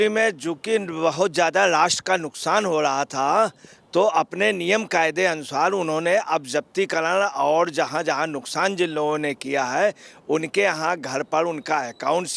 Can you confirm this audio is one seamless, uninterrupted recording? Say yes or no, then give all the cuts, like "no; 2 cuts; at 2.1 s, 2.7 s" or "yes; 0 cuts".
yes; 0 cuts